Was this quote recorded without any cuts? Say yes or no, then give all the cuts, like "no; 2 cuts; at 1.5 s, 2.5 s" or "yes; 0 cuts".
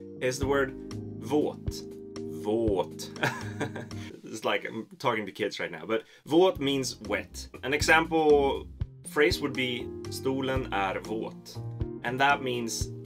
no; 1 cut; at 6.9 s